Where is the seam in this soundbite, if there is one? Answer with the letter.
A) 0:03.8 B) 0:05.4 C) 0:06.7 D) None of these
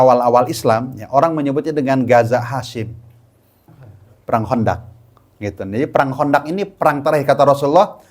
A